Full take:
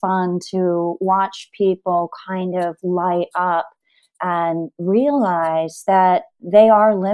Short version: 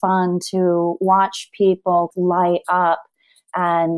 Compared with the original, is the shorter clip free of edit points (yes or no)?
no